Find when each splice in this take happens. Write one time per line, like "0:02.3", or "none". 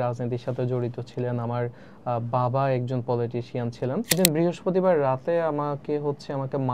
0:04.1